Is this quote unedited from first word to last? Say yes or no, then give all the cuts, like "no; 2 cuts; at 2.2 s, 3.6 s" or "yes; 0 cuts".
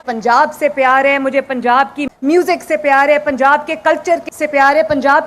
no; 2 cuts; at 2.0 s, 4.3 s